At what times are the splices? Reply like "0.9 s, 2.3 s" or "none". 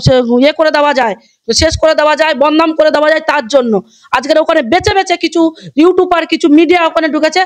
none